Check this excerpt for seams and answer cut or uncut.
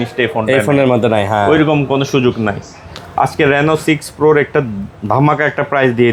uncut